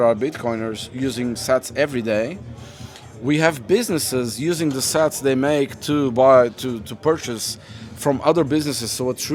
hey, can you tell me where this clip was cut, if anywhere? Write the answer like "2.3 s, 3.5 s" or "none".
none